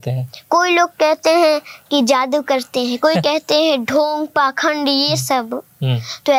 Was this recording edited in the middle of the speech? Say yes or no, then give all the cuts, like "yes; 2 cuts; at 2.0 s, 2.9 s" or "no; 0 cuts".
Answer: no; 0 cuts